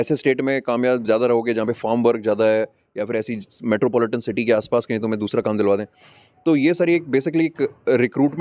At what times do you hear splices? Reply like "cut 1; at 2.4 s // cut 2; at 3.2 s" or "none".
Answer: none